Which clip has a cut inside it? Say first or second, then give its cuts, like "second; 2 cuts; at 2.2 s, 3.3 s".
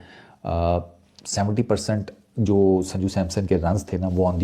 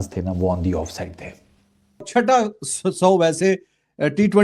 second; 1 cut; at 2.1 s